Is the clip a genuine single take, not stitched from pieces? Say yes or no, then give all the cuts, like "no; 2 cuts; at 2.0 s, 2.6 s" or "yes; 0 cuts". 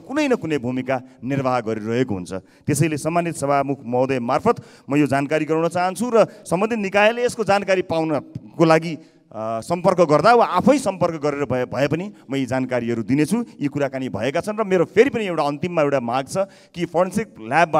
yes; 0 cuts